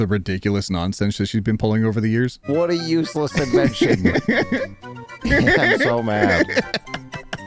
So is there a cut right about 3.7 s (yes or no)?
no